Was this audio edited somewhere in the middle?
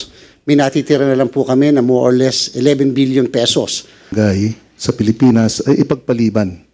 yes; 1 cut; at 4.1 s

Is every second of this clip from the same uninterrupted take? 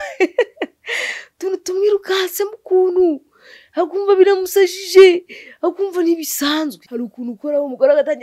no; 1 cut; at 6.8 s

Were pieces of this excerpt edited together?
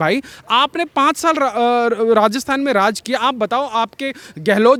no; 0 cuts

